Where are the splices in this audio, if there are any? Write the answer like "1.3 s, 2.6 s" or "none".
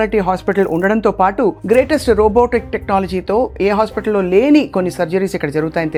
none